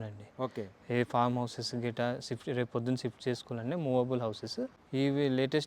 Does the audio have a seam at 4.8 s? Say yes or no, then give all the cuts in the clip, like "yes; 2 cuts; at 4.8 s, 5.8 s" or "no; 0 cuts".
yes; 1 cut; at 4.8 s